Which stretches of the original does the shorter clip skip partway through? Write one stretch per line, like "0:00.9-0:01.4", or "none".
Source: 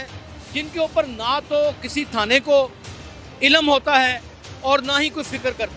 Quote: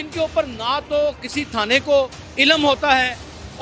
0:02.8-0:03.3